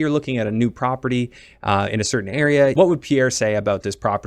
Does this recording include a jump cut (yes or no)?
yes